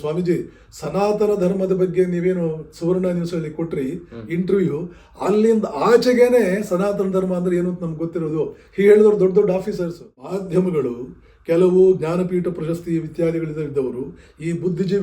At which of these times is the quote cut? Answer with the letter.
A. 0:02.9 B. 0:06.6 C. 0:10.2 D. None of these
C